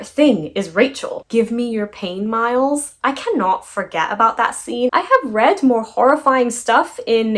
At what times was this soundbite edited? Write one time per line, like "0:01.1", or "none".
0:01.2
0:04.9